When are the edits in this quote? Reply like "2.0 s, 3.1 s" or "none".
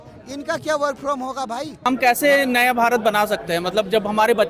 1.7 s

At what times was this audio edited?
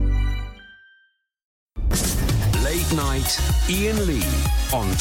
1.8 s

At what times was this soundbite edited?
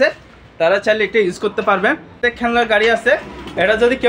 2.2 s

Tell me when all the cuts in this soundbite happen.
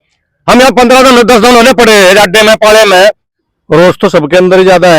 3.2 s

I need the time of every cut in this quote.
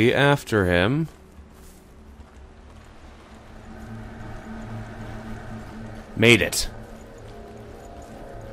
2.6 s

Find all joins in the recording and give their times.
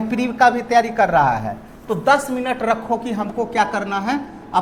none

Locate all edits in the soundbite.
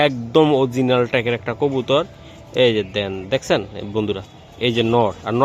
none

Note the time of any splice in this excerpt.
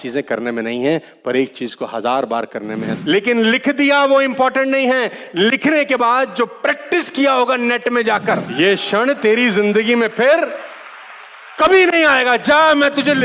2.9 s, 8.5 s

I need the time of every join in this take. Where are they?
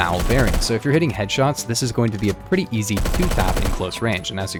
none

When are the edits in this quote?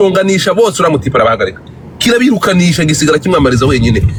none

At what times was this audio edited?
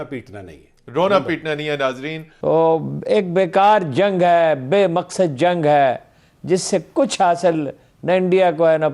2.3 s

